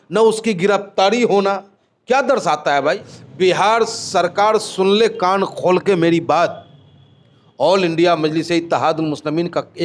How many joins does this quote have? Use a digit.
1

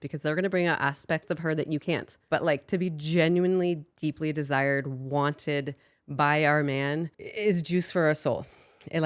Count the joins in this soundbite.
2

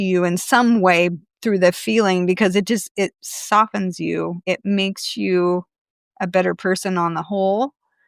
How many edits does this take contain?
1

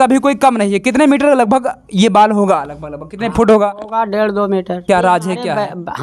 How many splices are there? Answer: 1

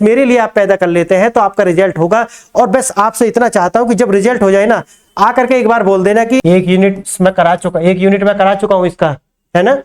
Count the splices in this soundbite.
1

